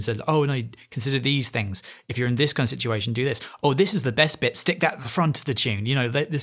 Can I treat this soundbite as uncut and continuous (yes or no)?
yes